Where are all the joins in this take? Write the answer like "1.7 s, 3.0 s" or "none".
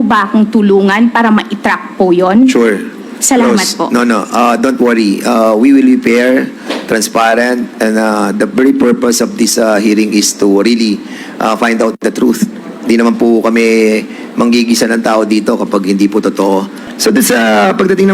16.8 s